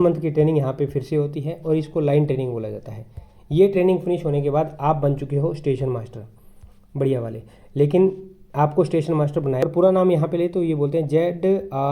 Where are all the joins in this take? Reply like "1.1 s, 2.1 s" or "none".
9.6 s